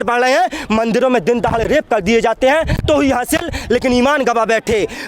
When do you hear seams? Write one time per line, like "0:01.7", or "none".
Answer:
0:02.8